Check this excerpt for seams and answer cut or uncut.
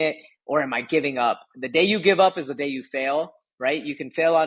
uncut